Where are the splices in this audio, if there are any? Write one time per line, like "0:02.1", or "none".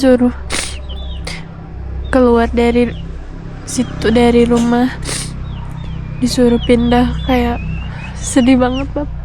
none

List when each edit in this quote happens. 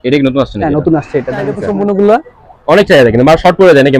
0:01.6

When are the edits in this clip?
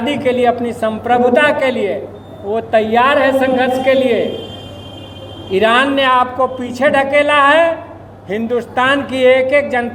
none

